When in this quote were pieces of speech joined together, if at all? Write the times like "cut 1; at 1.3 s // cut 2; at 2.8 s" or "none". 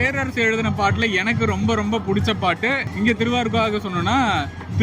none